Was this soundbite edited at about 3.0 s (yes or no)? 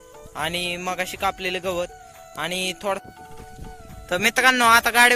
yes